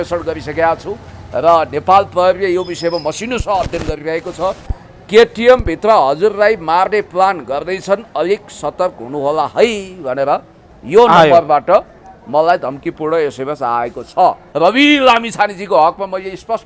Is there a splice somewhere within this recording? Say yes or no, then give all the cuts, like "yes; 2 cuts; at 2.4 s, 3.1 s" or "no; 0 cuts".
yes; 1 cut; at 14.4 s